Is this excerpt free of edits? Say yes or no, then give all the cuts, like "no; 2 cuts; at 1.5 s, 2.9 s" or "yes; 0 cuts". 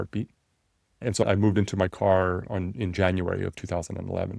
no; 1 cut; at 1.2 s